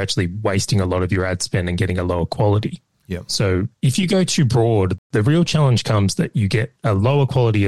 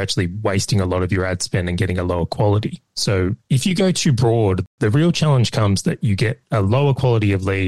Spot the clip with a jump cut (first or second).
second